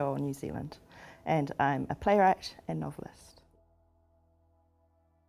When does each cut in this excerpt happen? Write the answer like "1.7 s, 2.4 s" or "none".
none